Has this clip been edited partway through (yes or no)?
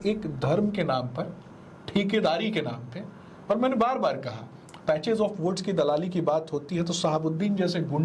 no